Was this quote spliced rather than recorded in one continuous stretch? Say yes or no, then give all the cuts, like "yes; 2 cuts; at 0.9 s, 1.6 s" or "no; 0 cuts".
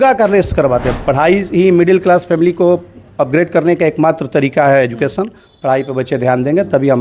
yes; 1 cut; at 0.9 s